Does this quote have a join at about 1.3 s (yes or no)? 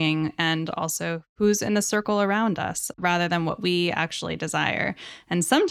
yes